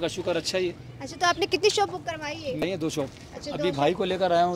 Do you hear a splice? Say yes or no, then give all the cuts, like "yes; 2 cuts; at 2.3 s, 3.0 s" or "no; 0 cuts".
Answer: yes; 1 cut; at 2.6 s